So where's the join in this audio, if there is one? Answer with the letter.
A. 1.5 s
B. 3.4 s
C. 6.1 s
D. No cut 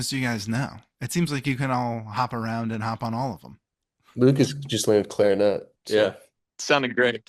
C